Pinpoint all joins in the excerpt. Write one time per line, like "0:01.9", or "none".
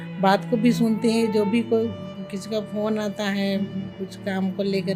none